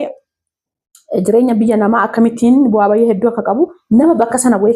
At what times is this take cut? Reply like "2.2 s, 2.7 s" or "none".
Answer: none